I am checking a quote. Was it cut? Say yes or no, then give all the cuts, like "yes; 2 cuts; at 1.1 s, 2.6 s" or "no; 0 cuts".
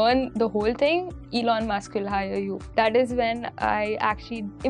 yes; 1 cut; at 2.6 s